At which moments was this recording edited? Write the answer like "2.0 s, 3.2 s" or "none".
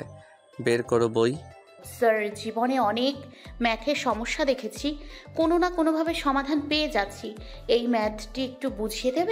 1.8 s

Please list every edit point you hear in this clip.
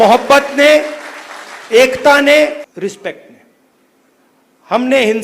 2.7 s

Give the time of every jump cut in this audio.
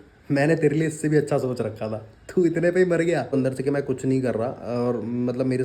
3.3 s

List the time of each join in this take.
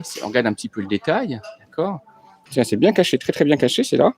2.4 s

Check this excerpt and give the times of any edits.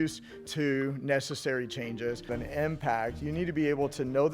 2.3 s

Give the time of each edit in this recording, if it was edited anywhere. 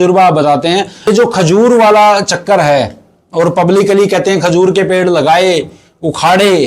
1.1 s

